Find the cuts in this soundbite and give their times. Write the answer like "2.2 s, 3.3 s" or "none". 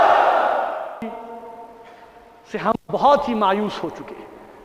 1.2 s